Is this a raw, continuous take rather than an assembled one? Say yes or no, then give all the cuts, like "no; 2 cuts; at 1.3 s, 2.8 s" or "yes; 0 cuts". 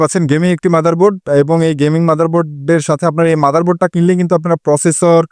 yes; 0 cuts